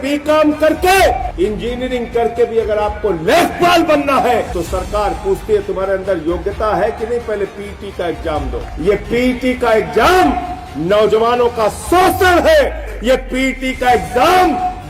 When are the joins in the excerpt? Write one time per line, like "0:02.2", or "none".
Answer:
0:01.3
0:04.5
0:08.6
0:12.9